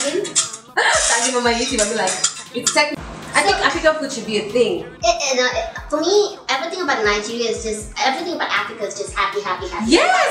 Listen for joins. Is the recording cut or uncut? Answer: uncut